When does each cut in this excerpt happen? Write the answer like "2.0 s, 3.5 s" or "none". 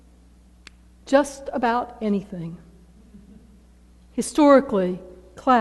4.7 s